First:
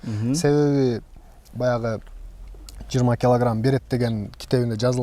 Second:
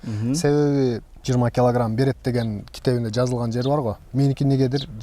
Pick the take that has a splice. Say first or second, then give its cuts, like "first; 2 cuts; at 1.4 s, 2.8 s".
second; 2 cuts; at 1.1 s, 4.0 s